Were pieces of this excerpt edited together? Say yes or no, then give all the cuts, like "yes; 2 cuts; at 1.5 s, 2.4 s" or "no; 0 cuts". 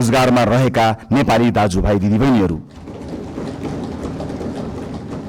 no; 0 cuts